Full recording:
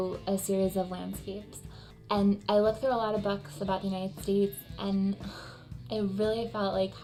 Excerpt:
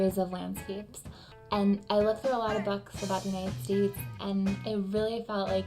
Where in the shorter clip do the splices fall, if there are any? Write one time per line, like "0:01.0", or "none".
0:04.6